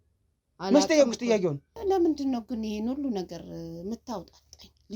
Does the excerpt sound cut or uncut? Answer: cut